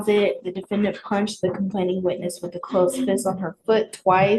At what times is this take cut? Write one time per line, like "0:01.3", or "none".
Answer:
none